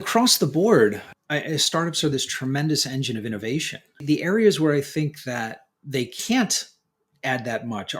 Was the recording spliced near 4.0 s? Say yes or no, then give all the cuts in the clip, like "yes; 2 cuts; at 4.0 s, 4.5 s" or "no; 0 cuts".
yes; 1 cut; at 4.0 s